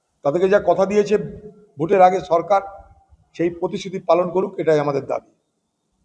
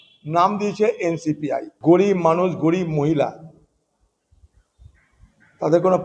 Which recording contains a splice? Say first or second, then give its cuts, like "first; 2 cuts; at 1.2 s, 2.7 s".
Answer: second; 1 cut; at 1.7 s